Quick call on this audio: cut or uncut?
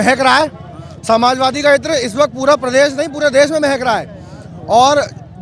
uncut